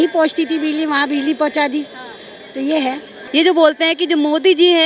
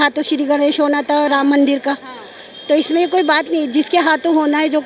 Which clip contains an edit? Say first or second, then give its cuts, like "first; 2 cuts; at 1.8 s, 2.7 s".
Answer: first; 1 cut; at 3.1 s